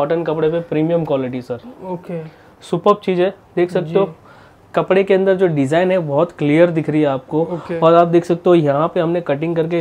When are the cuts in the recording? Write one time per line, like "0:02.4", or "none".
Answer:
none